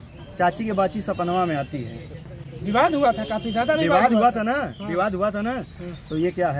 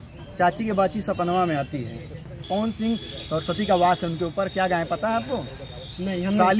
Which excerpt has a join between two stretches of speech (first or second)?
second